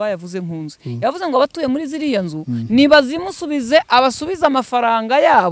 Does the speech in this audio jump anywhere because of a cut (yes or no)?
no